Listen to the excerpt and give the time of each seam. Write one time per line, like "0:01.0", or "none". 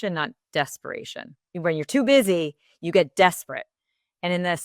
0:01.4